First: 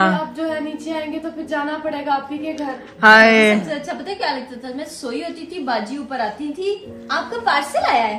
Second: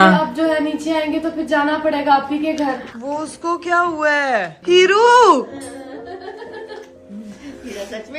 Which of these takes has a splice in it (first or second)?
second